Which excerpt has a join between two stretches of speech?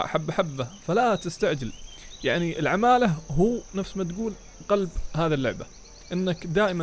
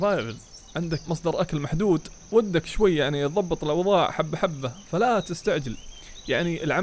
second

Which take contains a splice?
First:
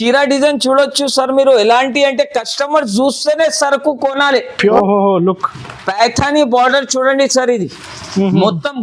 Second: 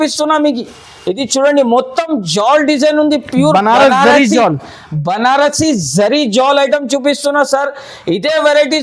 first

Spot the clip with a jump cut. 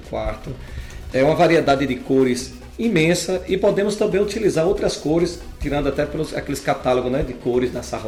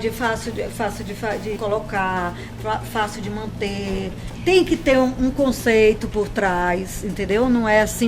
second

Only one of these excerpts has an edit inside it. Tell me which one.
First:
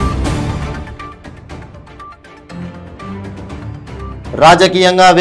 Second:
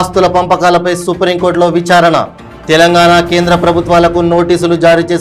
first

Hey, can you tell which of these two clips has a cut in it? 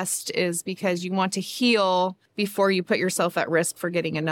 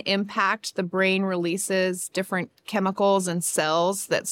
first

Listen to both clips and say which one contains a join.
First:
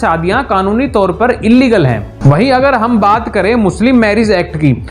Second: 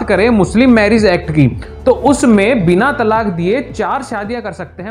first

